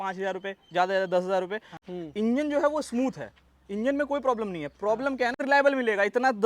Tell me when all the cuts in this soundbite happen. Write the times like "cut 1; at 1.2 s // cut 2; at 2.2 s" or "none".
cut 1; at 1.7 s // cut 2; at 5.4 s